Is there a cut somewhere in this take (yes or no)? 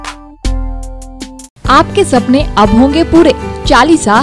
no